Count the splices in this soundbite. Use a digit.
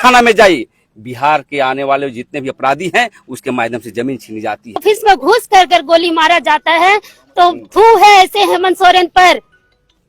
1